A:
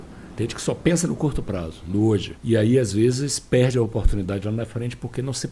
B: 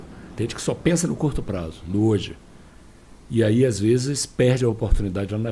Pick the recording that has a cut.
A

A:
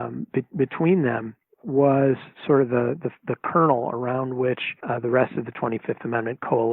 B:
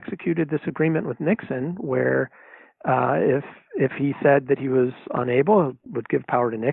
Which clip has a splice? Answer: A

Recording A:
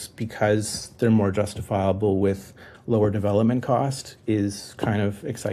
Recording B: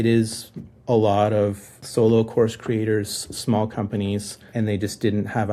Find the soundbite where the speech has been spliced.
B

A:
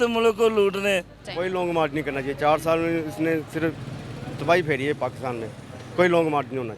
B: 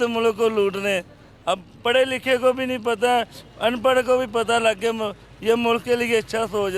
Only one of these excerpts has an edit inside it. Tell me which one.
A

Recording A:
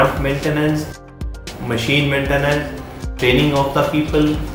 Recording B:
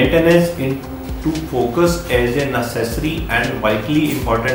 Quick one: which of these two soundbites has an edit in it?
A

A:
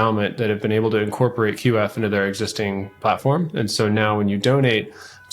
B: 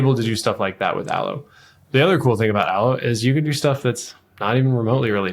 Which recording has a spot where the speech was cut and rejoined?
A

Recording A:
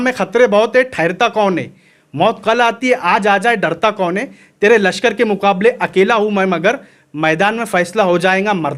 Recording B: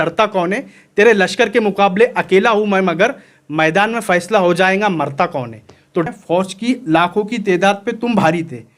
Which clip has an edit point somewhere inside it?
B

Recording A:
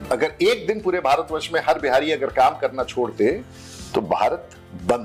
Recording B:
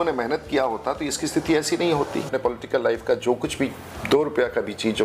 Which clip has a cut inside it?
B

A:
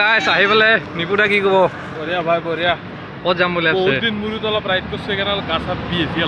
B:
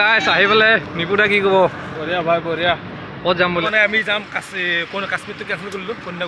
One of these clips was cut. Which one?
B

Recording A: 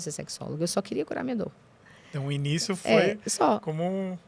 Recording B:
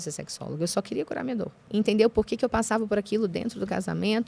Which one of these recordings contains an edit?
B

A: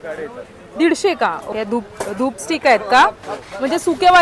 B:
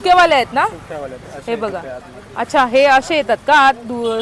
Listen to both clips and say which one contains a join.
A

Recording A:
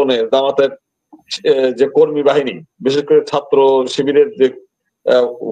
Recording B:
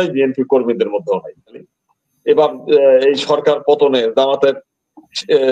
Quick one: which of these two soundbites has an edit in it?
B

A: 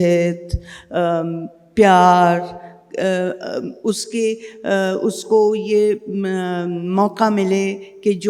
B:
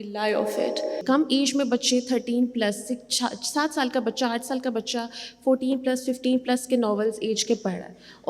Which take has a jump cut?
B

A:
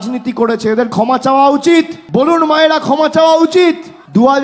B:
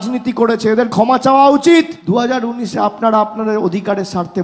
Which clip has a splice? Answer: B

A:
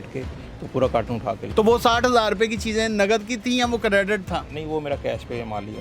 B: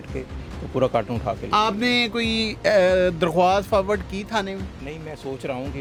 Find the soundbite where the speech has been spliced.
A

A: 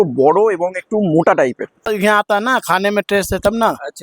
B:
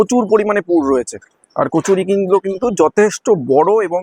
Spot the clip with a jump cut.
A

